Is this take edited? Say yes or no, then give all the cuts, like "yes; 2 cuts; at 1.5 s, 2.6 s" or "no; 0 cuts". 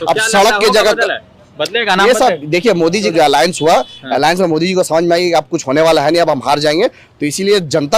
yes; 1 cut; at 3.1 s